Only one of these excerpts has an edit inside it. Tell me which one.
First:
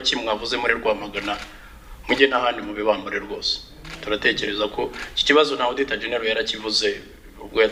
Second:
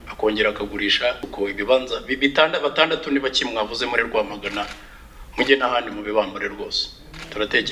second; 1 cut; at 1.3 s

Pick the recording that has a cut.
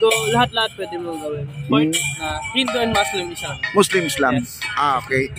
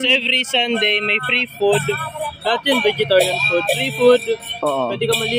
first; 1 cut; at 1.9 s

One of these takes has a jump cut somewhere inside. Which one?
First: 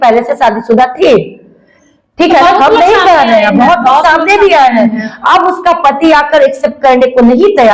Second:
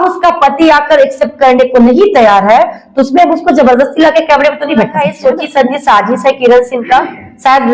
second; 1 cut; at 4.9 s

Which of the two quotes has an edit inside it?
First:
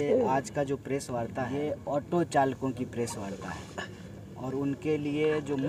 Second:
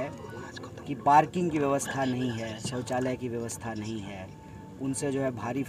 first; 1 cut; at 1.5 s

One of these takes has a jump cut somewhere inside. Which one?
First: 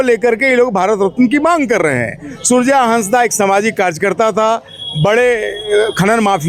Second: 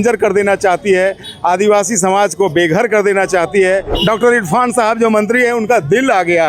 second; 1 cut; at 3.9 s

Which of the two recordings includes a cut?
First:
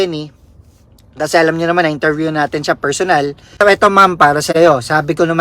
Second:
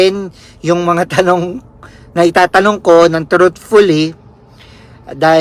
first; 1 cut; at 3.6 s

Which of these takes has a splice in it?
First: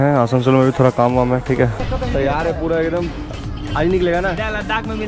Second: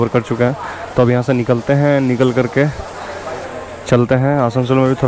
first; 1 cut; at 1.8 s

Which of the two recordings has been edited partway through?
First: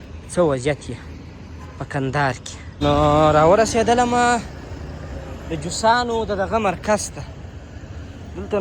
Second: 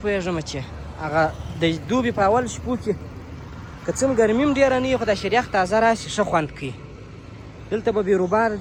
first; 1 cut; at 2.7 s

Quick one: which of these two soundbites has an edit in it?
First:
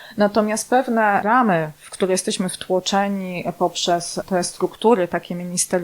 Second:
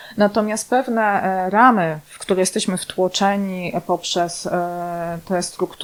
first; 2 cuts; at 1.2 s, 4.2 s

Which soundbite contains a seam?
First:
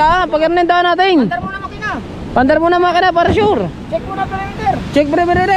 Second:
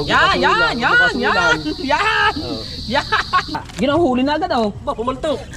second; 1 cut; at 3.6 s

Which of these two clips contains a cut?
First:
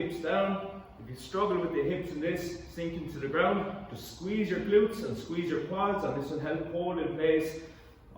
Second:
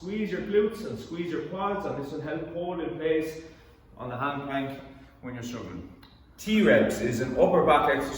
second; 1 cut; at 6.4 s

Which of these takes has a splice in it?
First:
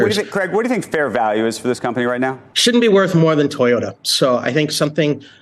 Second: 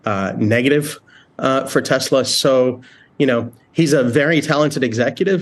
first; 1 cut; at 2.5 s

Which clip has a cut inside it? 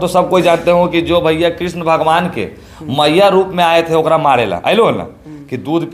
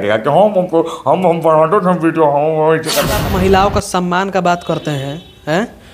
second; 1 cut; at 3.3 s

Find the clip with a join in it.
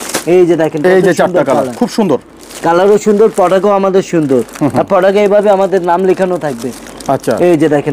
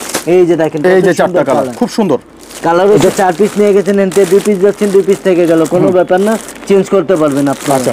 second; 1 cut; at 3.0 s

